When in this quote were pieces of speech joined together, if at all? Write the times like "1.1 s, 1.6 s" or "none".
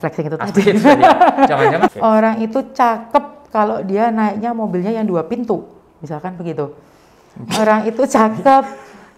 1.9 s

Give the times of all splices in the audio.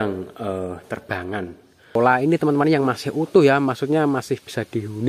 2.0 s

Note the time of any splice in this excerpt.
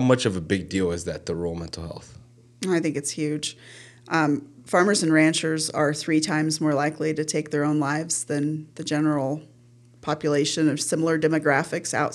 none

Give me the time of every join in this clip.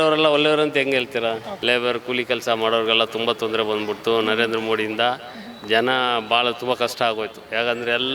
1.5 s

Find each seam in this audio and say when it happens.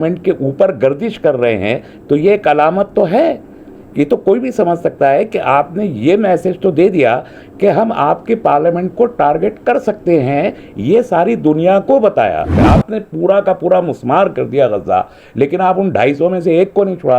12.6 s

